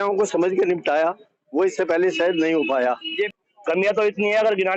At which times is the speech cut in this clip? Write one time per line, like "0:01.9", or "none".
0:03.3